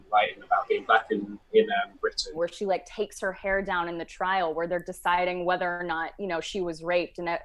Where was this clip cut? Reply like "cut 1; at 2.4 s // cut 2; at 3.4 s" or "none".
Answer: cut 1; at 2.2 s